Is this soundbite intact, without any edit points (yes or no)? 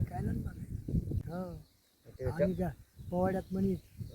no